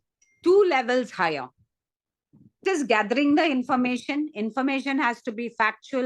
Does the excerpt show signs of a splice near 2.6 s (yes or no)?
yes